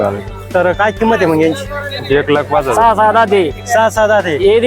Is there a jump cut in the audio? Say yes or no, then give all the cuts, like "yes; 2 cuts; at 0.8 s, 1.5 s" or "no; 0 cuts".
yes; 1 cut; at 2.7 s